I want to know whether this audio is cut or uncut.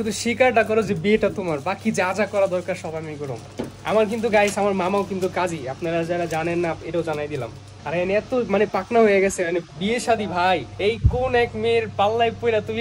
cut